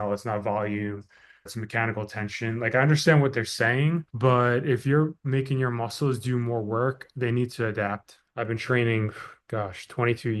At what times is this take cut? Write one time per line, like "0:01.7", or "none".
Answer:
0:01.5
0:08.2